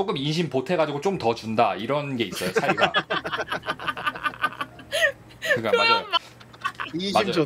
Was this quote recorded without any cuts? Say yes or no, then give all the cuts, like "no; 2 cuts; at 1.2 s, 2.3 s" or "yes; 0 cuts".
yes; 0 cuts